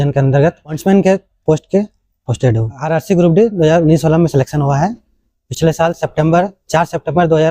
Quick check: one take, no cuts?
no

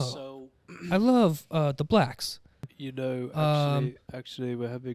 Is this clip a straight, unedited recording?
no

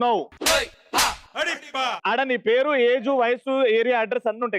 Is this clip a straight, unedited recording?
no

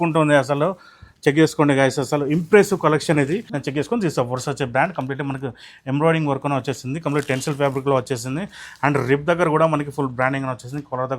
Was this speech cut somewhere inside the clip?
yes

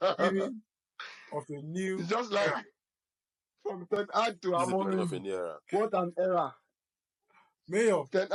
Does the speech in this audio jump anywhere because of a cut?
no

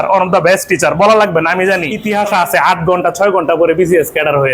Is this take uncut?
no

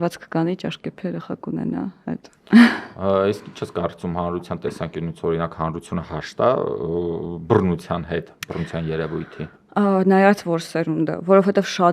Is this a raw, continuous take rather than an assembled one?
yes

